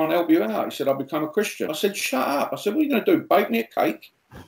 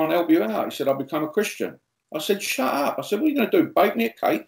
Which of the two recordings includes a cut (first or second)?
first